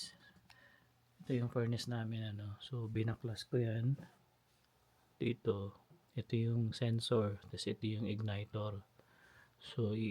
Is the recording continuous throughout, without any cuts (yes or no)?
yes